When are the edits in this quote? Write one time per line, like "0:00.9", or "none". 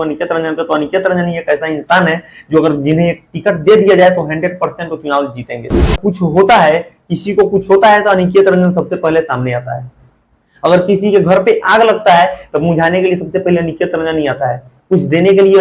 0:06.0